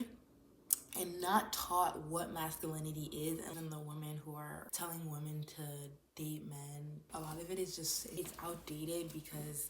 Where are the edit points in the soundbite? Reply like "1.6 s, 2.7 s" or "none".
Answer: 3.5 s, 4.7 s, 7.0 s, 8.1 s